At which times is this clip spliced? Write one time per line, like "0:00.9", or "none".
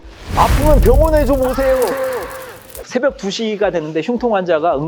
0:02.7